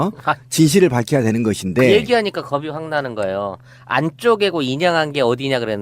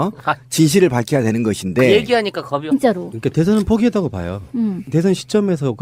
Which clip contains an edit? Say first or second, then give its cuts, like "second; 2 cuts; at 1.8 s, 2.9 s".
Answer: first; 1 cut; at 2.6 s